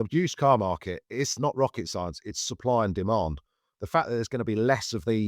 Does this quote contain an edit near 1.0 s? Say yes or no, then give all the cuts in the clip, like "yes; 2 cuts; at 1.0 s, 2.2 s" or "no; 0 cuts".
yes; 2 cuts; at 1.0 s, 3.7 s